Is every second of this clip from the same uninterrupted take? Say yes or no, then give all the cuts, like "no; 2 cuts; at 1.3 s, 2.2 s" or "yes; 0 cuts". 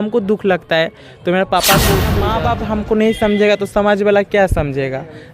no; 1 cut; at 2.2 s